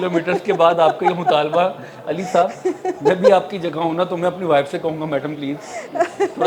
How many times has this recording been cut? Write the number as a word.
zero